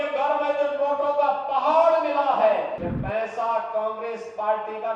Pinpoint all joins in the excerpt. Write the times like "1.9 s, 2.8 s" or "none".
2.9 s